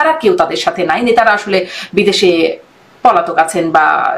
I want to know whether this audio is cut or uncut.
uncut